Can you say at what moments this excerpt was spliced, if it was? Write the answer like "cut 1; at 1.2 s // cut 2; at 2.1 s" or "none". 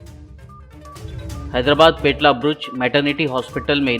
cut 1; at 1.4 s